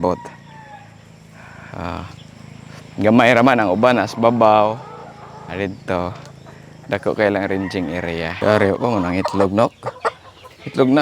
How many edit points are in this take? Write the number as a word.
one